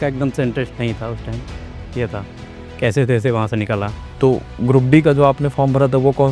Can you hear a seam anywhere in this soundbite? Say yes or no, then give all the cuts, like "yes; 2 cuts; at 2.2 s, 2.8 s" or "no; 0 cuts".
yes; 1 cut; at 4.0 s